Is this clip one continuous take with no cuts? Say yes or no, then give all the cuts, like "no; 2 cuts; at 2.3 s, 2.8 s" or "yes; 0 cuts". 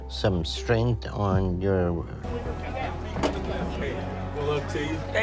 yes; 0 cuts